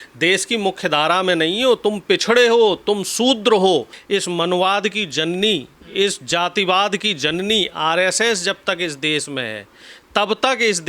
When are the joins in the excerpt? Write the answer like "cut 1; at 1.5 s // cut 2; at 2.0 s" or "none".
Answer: cut 1; at 4.0 s